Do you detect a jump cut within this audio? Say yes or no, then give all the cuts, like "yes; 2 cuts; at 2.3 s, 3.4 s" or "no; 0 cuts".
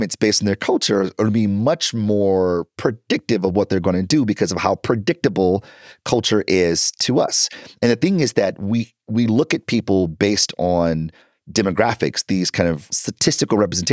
yes; 1 cut; at 12.9 s